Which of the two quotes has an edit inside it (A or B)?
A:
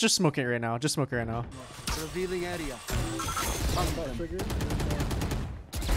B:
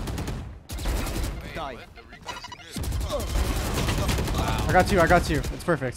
A